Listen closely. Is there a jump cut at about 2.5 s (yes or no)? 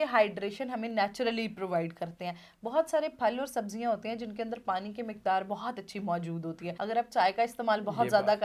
no